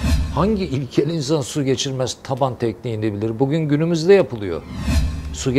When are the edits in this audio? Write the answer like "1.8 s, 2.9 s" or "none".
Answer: none